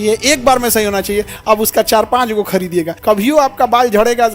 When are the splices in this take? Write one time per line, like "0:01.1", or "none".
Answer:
0:02.9